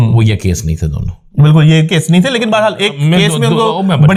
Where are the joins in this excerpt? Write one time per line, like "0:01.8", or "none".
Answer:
none